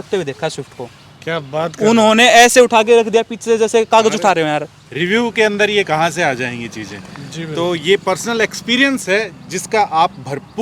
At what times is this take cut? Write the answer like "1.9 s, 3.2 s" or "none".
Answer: 4.8 s